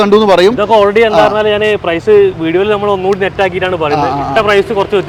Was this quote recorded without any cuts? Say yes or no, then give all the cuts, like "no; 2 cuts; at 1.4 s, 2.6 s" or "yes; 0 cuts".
yes; 0 cuts